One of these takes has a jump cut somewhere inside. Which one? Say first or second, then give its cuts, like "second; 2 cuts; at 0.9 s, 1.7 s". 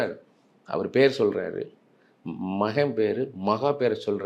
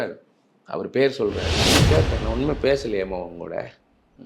second; 1 cut; at 1.6 s